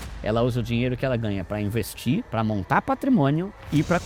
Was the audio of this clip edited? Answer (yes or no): no